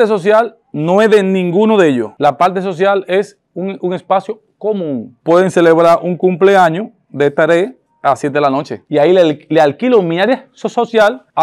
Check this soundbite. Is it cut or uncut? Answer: cut